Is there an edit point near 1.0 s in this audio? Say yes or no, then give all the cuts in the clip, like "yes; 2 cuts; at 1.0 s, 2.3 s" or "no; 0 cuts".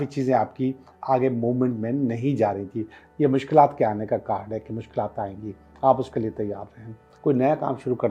no; 2 cuts; at 3.0 s, 7.0 s